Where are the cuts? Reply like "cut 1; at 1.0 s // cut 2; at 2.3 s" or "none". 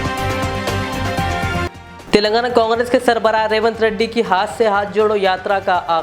cut 1; at 1.6 s

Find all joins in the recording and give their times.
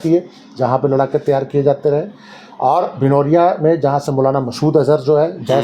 none

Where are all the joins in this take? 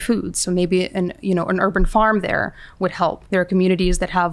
cut 1; at 3.2 s

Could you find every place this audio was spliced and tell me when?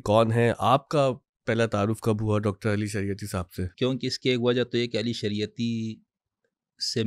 cut 1; at 3.7 s

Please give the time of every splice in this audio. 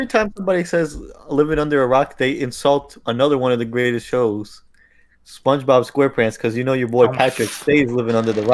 none

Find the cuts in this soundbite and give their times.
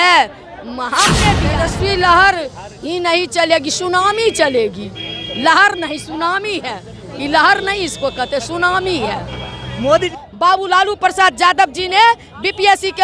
cut 1; at 1.4 s // cut 2; at 10.1 s

